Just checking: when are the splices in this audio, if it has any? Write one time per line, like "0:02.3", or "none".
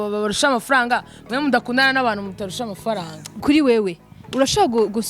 0:03.4